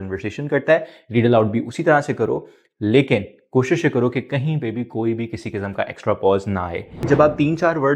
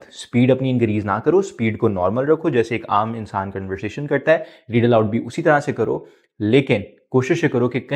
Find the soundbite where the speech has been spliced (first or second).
first